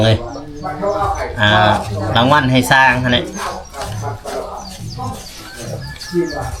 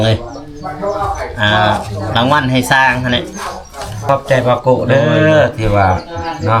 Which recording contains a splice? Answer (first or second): second